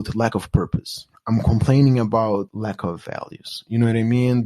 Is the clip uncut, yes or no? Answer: no